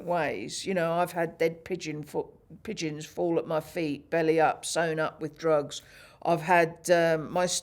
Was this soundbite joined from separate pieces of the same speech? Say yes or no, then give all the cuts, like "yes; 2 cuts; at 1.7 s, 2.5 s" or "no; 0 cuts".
no; 0 cuts